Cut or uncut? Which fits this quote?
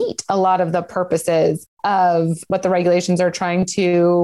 cut